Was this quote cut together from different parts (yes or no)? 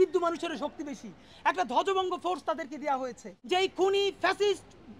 yes